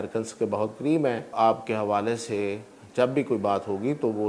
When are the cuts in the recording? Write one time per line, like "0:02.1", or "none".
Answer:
0:01.3